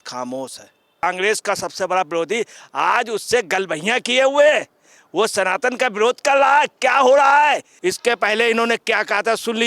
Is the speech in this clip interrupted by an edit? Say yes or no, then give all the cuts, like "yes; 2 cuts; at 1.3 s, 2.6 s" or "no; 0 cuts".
yes; 2 cuts; at 1.0 s, 7.7 s